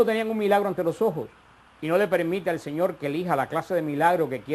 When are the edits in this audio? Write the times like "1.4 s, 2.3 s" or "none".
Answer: 3.5 s